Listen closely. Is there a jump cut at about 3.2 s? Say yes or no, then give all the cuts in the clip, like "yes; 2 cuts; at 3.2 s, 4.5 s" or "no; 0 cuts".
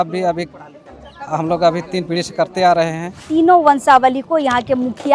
yes; 1 cut; at 3.2 s